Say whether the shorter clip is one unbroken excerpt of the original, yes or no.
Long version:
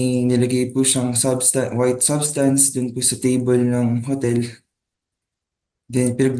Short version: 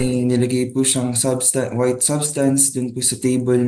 yes